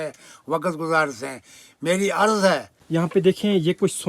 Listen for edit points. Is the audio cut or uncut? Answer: cut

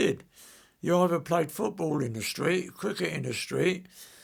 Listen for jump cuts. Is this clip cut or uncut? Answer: uncut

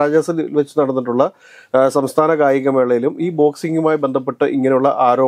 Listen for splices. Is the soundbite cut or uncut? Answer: uncut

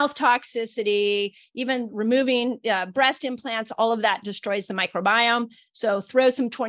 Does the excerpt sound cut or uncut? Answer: uncut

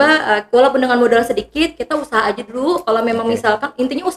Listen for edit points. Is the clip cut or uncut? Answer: uncut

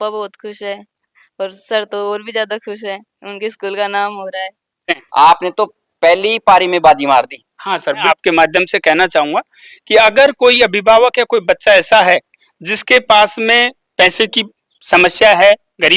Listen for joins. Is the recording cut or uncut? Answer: cut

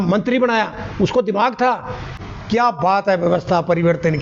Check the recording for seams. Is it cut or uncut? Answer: cut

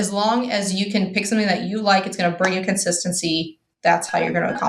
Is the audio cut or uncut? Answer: uncut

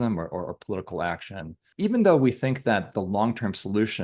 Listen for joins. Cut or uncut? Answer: cut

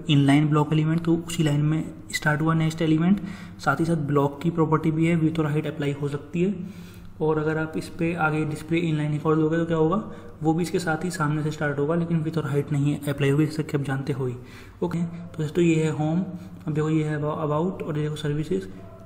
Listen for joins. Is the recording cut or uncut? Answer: cut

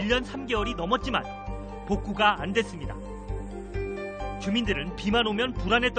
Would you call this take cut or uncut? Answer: uncut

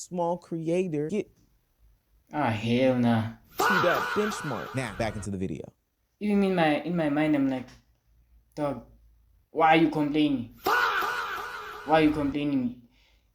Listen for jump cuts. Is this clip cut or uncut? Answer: cut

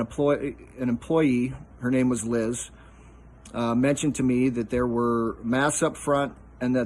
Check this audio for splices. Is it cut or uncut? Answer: uncut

